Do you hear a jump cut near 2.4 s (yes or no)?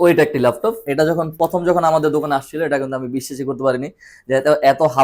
no